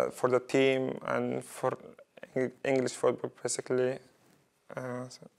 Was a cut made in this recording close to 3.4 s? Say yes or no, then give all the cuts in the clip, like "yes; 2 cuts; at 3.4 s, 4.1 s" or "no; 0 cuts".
no; 0 cuts